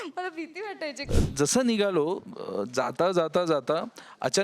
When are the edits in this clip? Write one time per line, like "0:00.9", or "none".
0:01.1